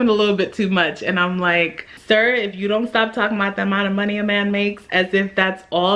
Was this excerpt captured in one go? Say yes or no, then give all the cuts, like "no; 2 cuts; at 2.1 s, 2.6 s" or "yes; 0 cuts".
no; 1 cut; at 1.9 s